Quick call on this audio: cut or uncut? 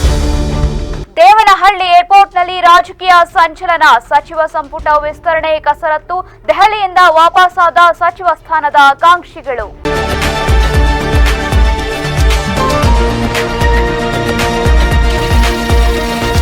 cut